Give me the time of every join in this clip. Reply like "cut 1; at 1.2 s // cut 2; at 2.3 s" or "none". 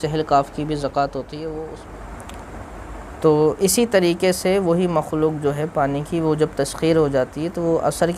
cut 1; at 1.7 s